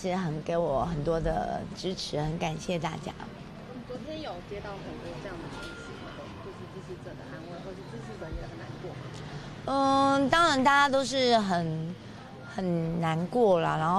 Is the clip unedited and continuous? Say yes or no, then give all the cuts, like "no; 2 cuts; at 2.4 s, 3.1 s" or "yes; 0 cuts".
yes; 0 cuts